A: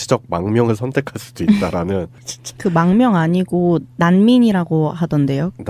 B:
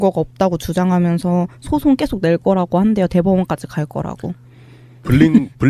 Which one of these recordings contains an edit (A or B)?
B